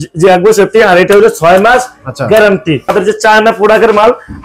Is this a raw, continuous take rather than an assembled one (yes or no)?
no